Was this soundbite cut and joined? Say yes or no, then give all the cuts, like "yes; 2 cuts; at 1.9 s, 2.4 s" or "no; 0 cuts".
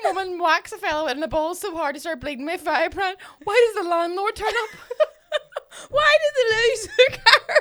no; 0 cuts